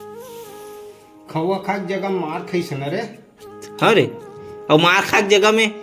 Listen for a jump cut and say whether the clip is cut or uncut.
uncut